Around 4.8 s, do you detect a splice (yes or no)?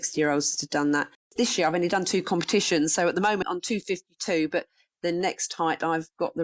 no